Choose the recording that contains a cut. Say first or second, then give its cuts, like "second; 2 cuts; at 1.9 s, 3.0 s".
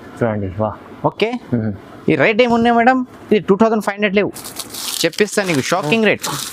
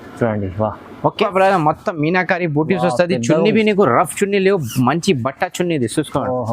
second; 1 cut; at 1.1 s